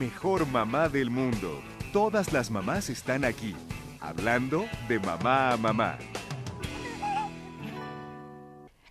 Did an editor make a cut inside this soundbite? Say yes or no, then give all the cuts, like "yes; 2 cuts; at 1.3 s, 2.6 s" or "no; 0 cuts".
no; 0 cuts